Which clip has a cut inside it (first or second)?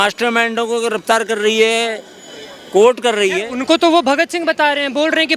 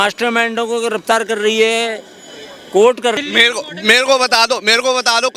second